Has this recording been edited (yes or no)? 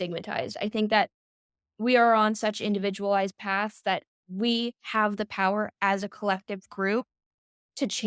no